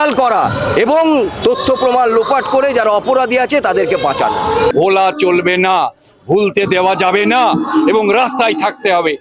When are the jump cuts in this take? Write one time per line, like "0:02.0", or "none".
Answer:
0:04.7